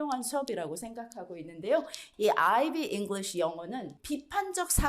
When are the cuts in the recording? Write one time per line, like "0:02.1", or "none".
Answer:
0:02.0
0:03.9